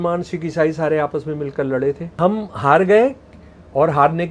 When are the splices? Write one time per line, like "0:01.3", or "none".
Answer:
0:02.1